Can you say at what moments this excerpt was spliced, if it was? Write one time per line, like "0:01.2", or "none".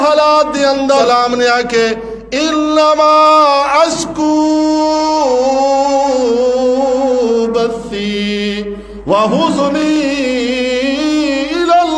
0:01.0